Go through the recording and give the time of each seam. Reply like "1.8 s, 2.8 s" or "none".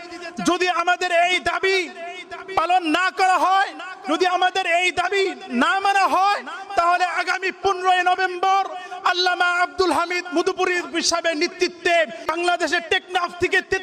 12.3 s